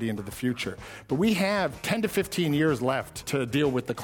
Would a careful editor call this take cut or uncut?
cut